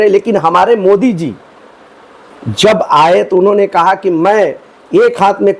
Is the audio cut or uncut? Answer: uncut